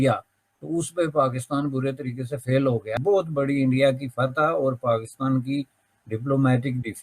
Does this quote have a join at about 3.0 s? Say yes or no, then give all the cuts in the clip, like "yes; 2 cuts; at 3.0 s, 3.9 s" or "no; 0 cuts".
yes; 1 cut; at 3.0 s